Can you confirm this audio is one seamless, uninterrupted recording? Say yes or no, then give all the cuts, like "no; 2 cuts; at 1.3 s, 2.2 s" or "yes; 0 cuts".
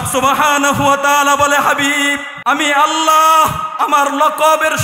no; 1 cut; at 2.3 s